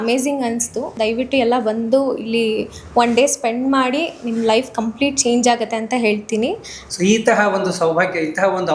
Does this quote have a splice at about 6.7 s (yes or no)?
yes